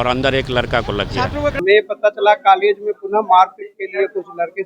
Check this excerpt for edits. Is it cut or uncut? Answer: cut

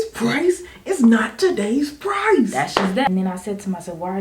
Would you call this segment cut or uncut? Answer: cut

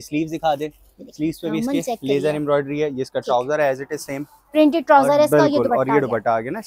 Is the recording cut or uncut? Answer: uncut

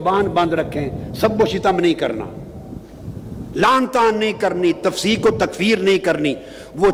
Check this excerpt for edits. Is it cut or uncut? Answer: uncut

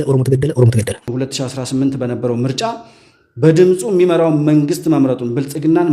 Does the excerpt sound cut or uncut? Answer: cut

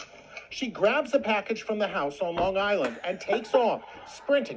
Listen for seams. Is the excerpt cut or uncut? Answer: uncut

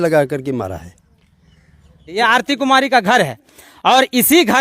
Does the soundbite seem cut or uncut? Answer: cut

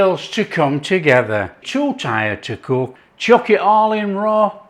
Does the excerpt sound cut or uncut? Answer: cut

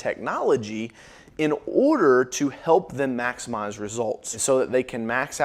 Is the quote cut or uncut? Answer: cut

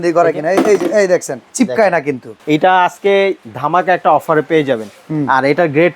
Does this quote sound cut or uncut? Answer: cut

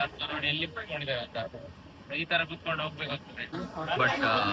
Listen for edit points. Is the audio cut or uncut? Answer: cut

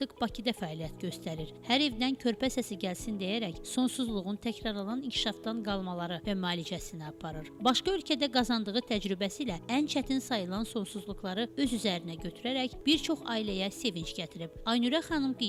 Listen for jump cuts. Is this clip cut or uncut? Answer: uncut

